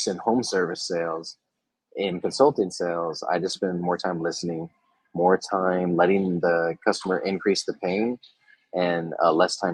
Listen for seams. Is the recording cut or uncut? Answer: uncut